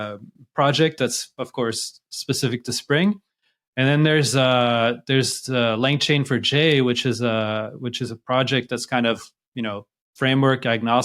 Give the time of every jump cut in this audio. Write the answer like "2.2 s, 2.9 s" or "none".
none